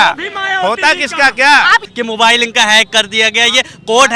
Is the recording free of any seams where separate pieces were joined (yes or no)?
no